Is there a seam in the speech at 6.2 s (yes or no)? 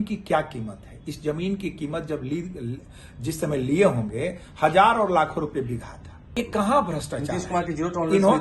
yes